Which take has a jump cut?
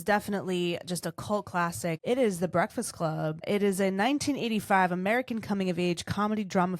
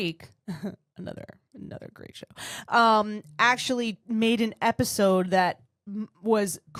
first; 2 cuts; at 2.0 s, 3.4 s

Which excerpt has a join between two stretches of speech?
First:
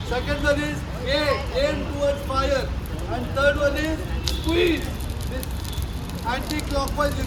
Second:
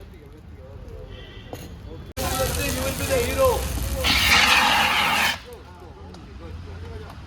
second; 1 cut; at 2.2 s

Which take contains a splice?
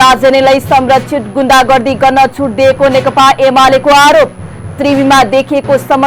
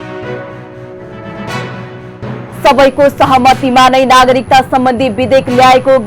second; 1 cut; at 1.1 s

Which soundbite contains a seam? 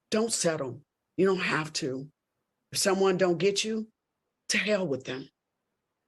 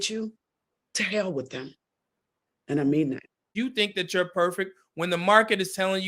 second; 1 cut; at 3.5 s

